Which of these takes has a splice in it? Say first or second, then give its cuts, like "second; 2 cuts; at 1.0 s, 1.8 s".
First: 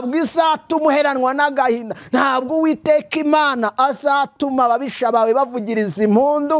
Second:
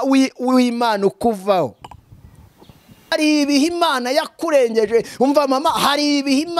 second; 1 cut; at 3.1 s